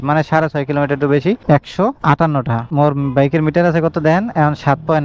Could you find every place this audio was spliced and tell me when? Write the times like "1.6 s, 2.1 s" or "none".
none